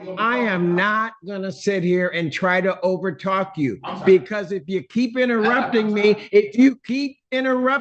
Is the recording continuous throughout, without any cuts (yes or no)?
yes